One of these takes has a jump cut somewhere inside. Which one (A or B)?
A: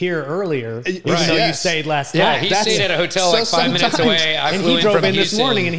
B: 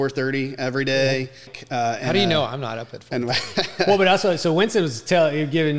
B